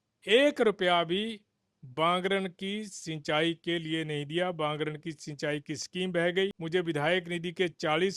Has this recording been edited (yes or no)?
yes